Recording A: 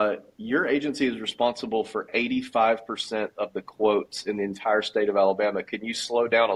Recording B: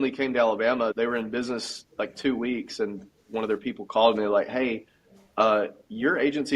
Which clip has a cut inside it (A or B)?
B